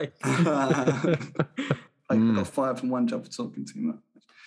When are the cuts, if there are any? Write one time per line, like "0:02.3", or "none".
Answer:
0:01.9